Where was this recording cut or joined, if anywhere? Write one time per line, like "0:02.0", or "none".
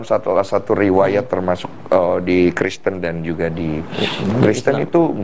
0:03.7